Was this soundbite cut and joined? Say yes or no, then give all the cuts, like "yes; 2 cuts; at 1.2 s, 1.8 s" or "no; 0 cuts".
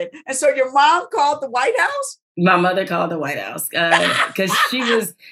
no; 0 cuts